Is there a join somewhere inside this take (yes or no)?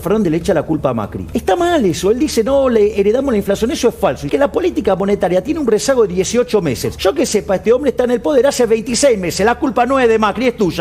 yes